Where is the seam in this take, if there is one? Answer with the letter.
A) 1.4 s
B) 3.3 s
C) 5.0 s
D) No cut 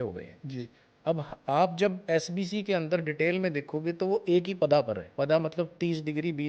C